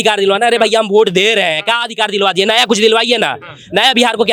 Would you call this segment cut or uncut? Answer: uncut